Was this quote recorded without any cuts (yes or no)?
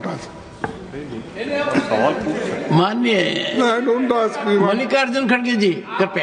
yes